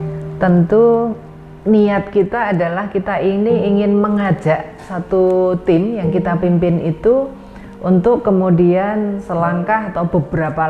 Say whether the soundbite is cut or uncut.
uncut